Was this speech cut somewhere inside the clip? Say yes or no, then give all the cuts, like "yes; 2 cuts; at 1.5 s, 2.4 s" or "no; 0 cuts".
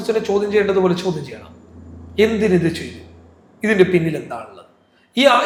no; 0 cuts